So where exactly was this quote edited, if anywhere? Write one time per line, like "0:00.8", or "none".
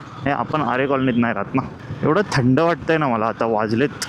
0:01.8

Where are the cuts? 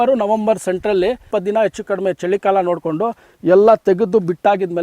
0:01.2

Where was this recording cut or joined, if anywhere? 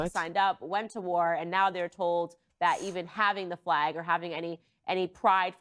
none

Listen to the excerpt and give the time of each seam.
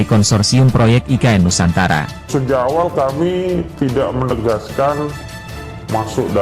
0:02.2

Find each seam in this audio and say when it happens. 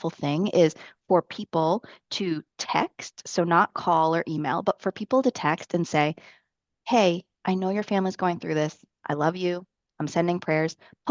none

